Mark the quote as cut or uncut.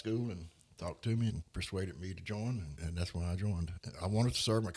cut